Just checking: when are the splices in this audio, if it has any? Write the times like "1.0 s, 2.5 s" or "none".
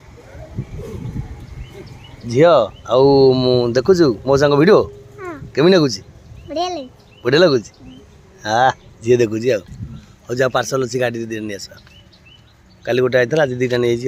none